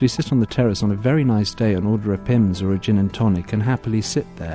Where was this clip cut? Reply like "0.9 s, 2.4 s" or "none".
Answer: none